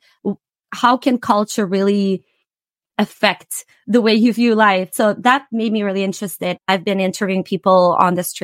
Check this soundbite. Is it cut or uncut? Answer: cut